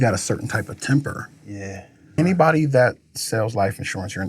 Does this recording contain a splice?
yes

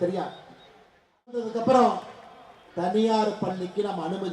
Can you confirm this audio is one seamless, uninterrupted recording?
no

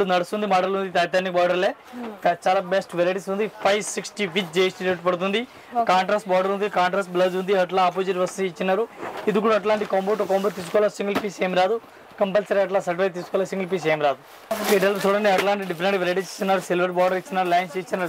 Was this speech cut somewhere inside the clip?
no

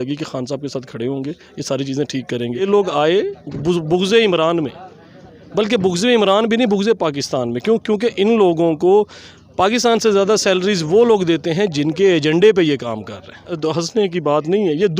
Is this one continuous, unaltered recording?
no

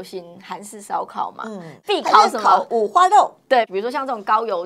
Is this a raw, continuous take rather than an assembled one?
yes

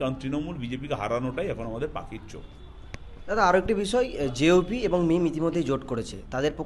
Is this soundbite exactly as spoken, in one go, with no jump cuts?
yes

